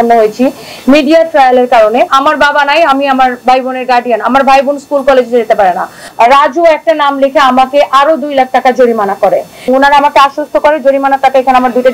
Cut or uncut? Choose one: cut